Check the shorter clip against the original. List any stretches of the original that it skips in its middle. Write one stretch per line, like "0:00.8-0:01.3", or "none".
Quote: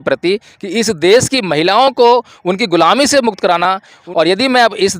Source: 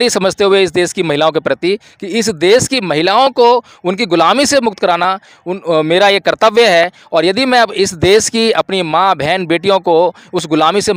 0:05.4-0:07.0